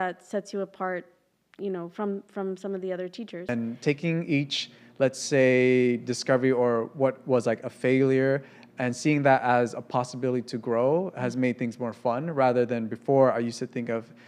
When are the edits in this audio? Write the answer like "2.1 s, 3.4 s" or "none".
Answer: 3.5 s